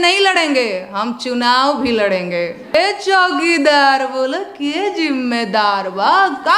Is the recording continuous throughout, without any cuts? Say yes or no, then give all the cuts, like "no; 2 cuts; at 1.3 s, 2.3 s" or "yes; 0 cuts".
no; 1 cut; at 2.7 s